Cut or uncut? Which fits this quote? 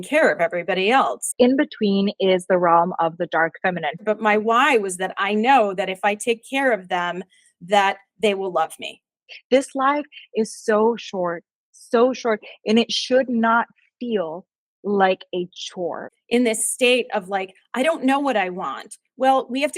cut